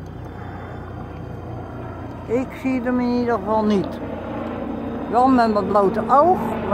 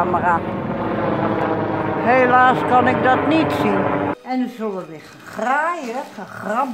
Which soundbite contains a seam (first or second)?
second